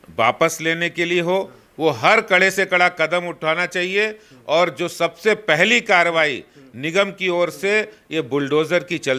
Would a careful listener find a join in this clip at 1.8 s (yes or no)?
no